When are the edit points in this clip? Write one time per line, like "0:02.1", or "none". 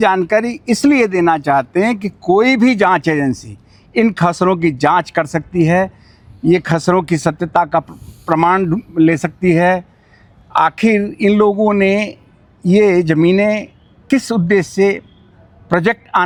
none